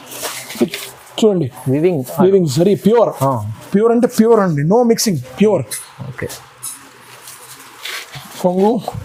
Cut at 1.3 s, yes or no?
no